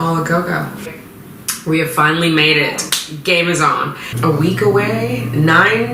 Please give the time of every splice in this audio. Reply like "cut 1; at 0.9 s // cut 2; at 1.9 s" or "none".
cut 1; at 1.0 s // cut 2; at 4.1 s